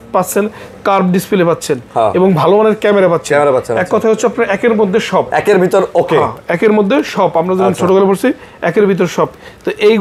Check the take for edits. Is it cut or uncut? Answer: uncut